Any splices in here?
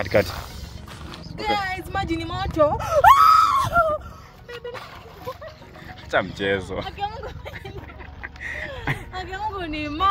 no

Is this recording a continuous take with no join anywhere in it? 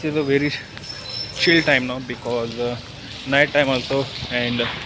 yes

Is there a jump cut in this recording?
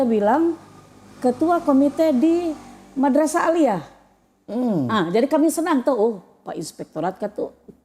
no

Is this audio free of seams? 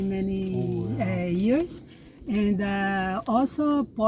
yes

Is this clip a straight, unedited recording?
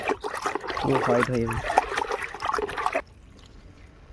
no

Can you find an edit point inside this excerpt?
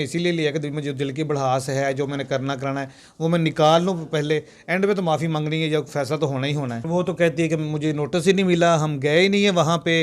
yes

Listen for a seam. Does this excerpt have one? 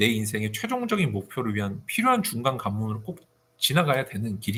no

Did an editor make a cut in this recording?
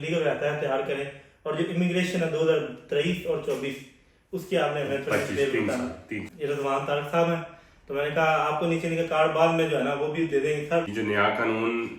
yes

